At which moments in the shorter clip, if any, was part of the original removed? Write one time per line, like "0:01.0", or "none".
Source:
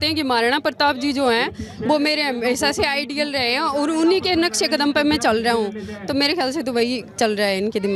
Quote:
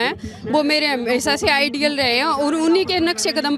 none